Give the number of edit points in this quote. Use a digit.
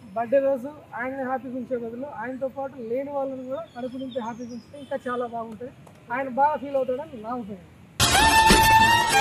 0